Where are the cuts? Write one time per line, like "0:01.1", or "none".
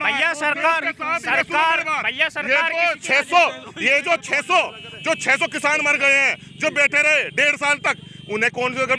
none